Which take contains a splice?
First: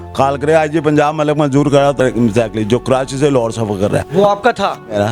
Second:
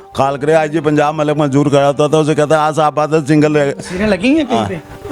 first; 1 cut; at 2.0 s

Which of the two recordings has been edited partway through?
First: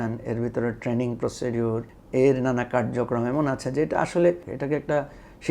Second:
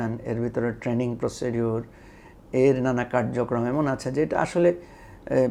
first; 2 cuts; at 1.9 s, 4.5 s

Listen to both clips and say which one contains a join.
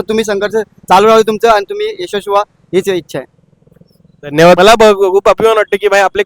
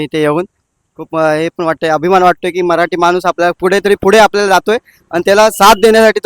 first; 1 cut; at 4.6 s

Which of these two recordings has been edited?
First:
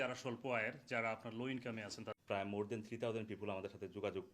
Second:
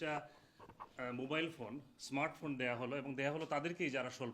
first; 1 cut; at 2.1 s

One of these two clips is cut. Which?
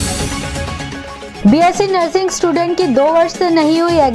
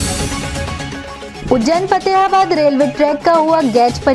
first; 1 cut; at 1.3 s

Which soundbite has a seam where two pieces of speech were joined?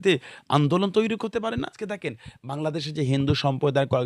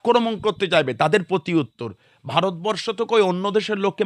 first; 1 cut; at 1.8 s

